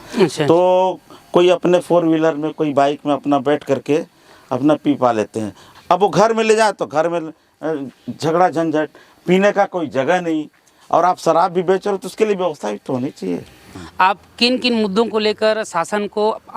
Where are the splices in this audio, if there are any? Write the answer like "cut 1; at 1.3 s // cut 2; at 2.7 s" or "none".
cut 1; at 5.6 s // cut 2; at 13.8 s